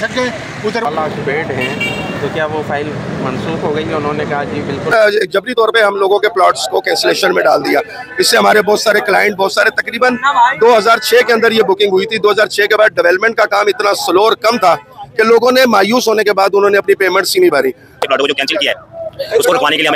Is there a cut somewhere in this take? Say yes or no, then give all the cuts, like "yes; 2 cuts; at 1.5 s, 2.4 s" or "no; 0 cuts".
yes; 3 cuts; at 0.9 s, 4.9 s, 18.0 s